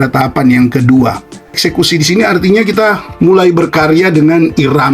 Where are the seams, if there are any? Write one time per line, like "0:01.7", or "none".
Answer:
0:01.6